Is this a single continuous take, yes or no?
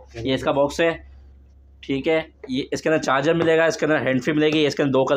yes